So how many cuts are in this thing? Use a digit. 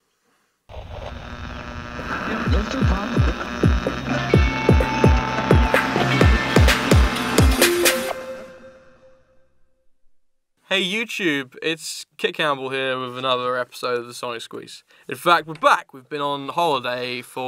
1